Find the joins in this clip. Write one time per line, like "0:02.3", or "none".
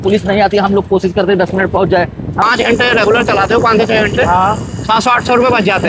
0:02.4